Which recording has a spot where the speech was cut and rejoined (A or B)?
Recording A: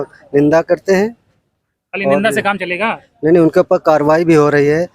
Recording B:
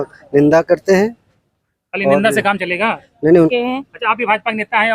B